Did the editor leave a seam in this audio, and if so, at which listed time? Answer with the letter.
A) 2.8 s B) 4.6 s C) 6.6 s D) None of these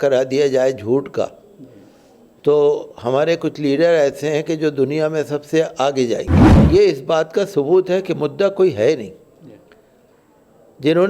C